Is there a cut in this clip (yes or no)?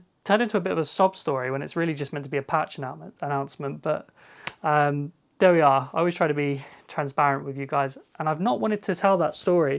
no